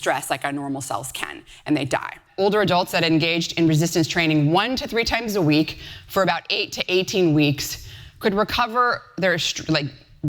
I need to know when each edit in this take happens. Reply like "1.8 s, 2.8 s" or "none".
2.2 s